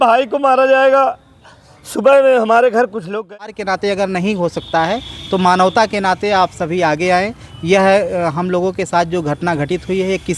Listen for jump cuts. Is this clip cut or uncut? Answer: cut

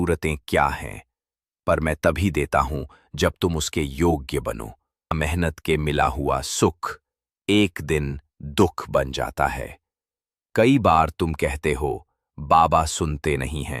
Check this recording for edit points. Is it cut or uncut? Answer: cut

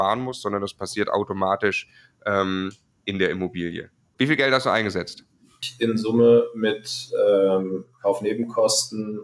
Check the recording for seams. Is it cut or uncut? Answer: cut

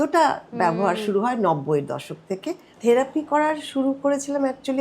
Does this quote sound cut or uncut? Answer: cut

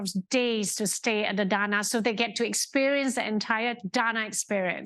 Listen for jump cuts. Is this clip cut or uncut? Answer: uncut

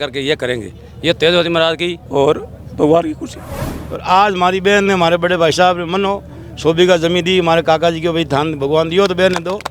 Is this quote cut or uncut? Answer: cut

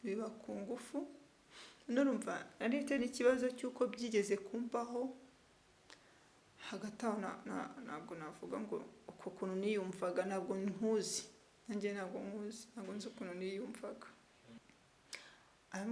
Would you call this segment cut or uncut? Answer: cut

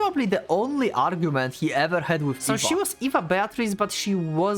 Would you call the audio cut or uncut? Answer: cut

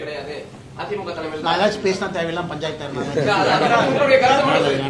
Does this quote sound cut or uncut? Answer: uncut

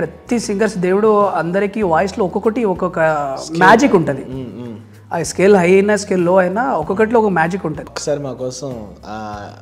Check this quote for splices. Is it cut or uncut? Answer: cut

